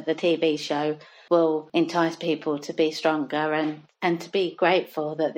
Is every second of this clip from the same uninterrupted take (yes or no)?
no